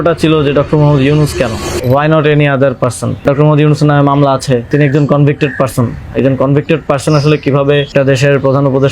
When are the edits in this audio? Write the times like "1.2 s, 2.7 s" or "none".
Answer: 1.7 s, 3.2 s, 4.7 s, 7.9 s